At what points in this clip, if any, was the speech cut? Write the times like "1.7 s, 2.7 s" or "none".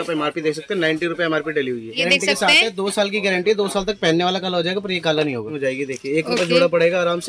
1.9 s, 5.5 s